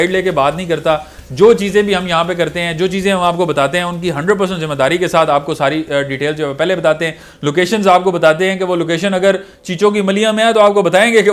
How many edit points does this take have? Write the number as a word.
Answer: zero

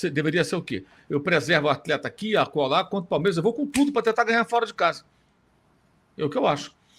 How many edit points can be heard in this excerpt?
zero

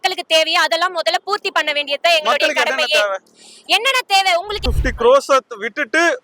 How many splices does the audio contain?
one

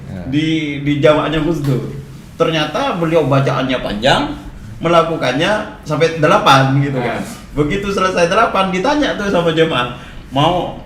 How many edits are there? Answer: zero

